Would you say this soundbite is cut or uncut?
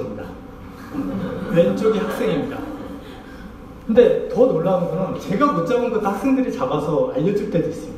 uncut